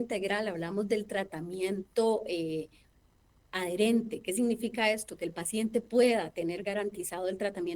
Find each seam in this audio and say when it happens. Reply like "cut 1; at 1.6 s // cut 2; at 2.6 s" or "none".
none